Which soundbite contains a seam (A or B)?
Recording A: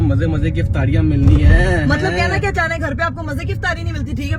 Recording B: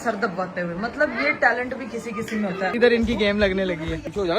B